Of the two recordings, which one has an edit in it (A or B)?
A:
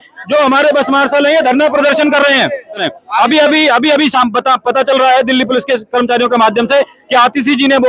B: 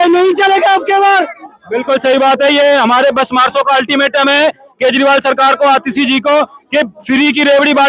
A